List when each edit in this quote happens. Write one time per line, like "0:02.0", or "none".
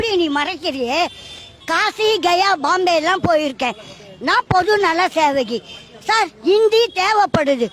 0:01.5